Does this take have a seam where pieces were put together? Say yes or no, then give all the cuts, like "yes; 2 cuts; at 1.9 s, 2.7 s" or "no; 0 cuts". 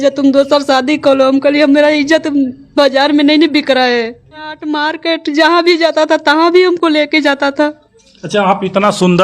yes; 1 cut; at 4.9 s